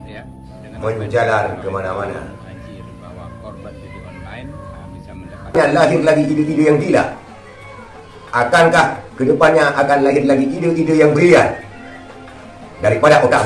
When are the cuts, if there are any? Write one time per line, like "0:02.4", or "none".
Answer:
0:05.6